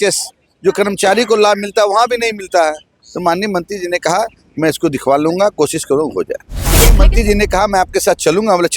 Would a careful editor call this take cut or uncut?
cut